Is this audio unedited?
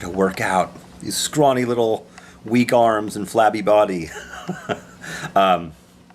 no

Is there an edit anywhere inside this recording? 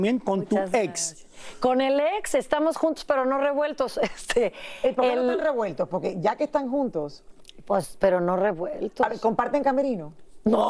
no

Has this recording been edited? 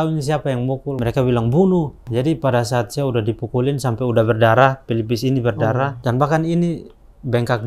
yes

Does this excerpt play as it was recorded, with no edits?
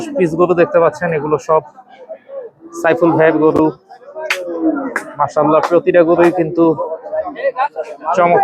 yes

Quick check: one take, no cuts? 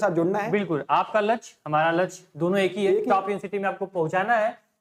yes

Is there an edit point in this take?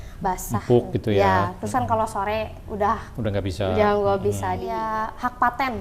yes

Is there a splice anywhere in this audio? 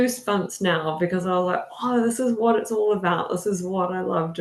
no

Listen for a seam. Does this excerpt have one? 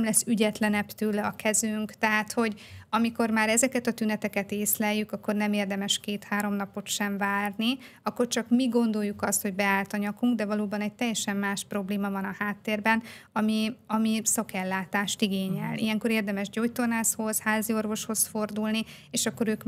no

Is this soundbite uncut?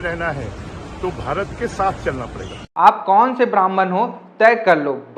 no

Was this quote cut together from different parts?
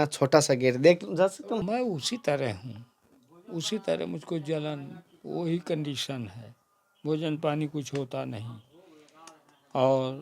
yes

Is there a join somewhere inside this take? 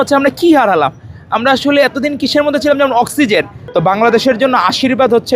yes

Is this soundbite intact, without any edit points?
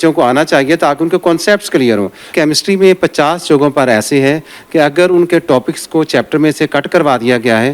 no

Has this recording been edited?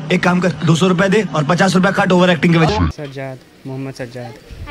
no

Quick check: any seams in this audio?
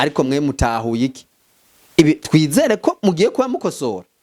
no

